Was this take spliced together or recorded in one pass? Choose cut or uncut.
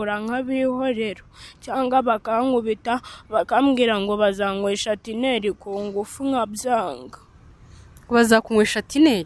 uncut